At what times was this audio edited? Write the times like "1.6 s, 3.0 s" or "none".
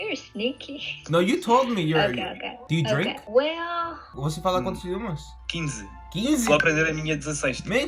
4.2 s